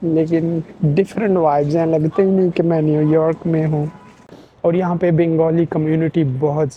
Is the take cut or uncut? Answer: uncut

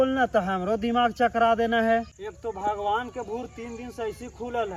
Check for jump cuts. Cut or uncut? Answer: uncut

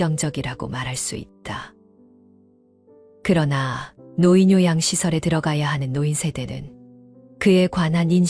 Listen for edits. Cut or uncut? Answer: cut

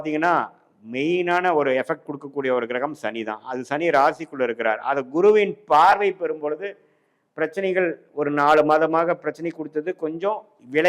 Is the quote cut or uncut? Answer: uncut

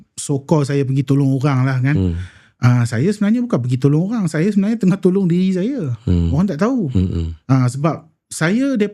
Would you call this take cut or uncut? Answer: uncut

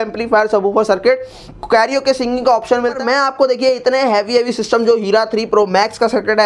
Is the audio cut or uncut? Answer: cut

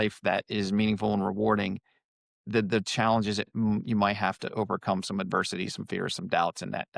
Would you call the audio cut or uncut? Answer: uncut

